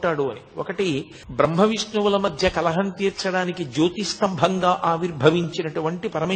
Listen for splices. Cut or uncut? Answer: cut